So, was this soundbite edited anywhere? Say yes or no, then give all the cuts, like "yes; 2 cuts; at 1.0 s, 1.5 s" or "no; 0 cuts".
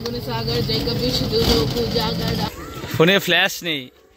yes; 1 cut; at 2.5 s